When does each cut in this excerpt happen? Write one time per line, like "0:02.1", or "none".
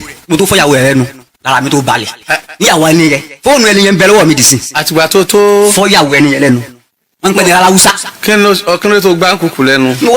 none